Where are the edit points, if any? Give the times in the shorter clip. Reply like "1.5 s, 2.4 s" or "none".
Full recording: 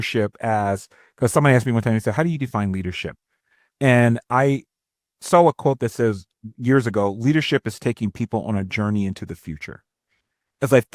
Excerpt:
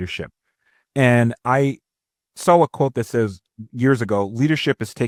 none